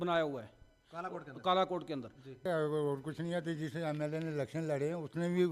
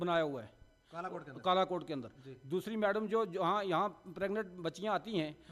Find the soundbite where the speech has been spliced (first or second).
first